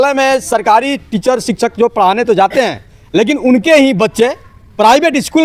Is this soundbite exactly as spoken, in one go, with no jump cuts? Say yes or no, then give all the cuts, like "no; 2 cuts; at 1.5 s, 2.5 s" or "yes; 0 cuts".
yes; 0 cuts